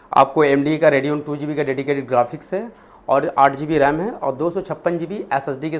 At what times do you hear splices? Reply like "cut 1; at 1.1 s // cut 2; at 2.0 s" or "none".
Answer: none